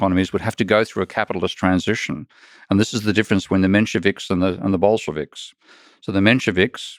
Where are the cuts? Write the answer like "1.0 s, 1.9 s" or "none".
none